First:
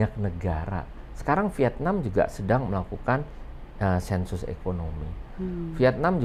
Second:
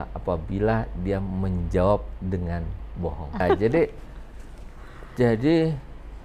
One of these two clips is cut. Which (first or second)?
second